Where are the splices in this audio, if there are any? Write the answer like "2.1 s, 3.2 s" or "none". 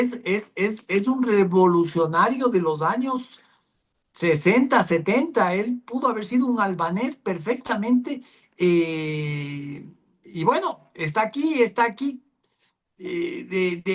none